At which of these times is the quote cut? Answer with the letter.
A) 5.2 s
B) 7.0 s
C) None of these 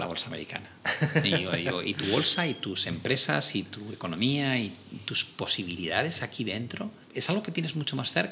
B